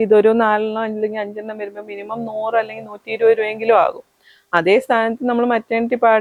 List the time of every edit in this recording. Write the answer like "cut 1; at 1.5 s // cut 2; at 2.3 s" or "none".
none